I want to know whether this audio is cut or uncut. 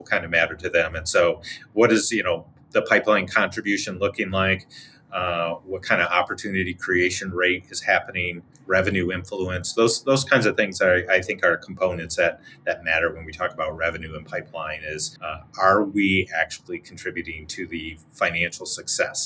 cut